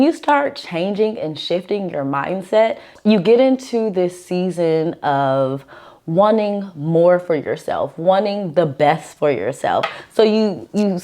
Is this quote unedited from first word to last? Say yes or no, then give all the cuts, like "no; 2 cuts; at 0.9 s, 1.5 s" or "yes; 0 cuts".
no; 1 cut; at 2.9 s